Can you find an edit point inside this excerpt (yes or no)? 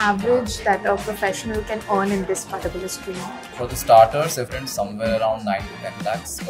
yes